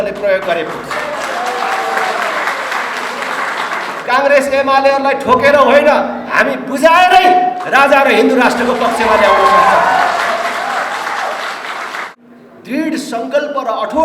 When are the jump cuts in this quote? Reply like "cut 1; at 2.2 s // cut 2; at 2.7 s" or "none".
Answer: cut 1; at 3.9 s // cut 2; at 12.1 s